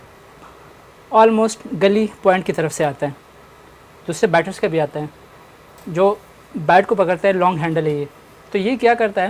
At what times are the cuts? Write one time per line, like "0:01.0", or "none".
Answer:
none

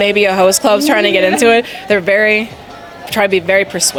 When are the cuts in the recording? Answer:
none

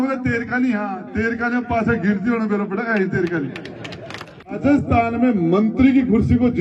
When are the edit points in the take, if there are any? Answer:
0:04.6

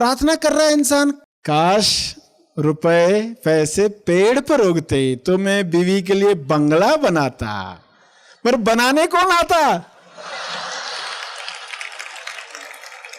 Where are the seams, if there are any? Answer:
0:01.2

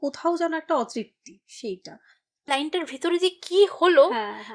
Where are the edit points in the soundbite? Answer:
0:02.5

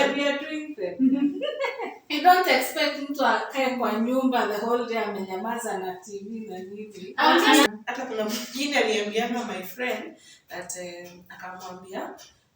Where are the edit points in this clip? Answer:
0:07.7

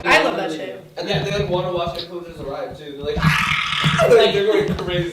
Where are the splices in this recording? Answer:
0:04.0

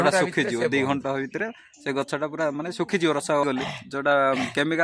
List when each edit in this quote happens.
0:03.4

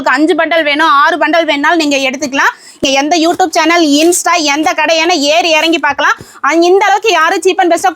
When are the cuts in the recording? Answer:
0:02.8

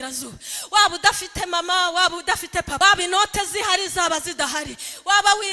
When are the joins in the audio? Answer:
0:02.7

